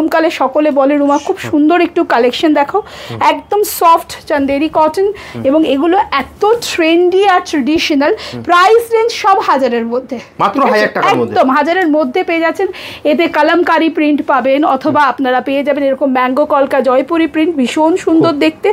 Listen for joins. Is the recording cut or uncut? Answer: uncut